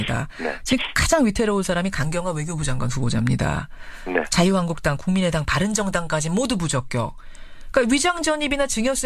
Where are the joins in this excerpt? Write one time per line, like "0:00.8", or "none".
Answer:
none